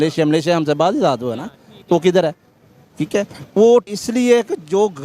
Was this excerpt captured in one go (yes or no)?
no